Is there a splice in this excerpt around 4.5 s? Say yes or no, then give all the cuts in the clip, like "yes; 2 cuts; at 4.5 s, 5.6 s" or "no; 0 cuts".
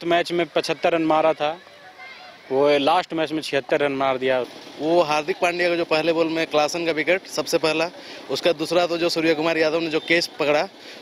yes; 1 cut; at 4.5 s